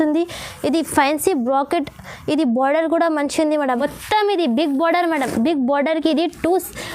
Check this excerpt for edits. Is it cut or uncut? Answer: cut